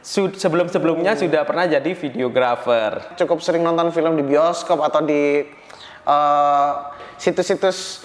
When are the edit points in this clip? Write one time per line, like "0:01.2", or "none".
0:03.1